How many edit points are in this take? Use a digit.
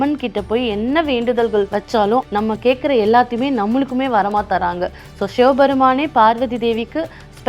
1